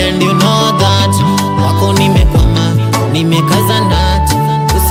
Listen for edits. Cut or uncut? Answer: uncut